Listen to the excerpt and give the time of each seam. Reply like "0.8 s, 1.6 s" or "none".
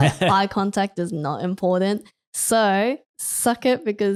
none